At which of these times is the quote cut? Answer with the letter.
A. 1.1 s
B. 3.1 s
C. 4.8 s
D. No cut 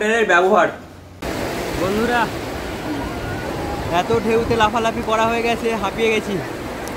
A